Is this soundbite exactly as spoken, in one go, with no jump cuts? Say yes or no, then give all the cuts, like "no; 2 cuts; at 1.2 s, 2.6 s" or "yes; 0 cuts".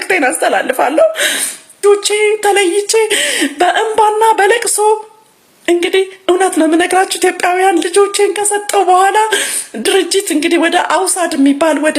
no; 1 cut; at 1.8 s